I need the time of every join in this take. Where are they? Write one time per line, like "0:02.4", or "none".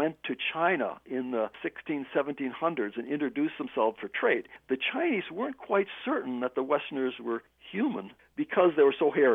0:01.6
0:04.4
0:07.8